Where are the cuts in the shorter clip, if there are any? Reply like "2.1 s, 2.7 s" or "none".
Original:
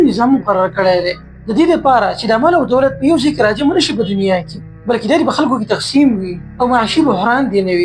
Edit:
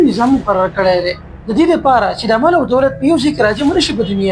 none